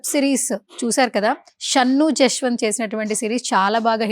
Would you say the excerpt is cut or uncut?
cut